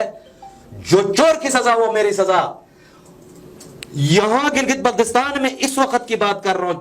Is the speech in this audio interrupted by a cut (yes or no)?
no